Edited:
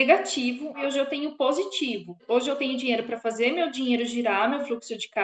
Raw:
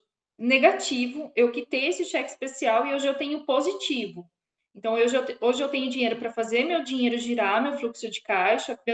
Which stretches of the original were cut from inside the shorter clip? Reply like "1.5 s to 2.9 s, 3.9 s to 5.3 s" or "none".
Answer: 1.3 s to 2.9 s, 4.3 s to 5.3 s